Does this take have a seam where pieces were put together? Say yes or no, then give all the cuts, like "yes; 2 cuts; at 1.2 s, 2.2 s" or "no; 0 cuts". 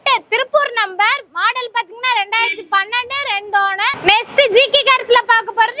yes; 1 cut; at 4.0 s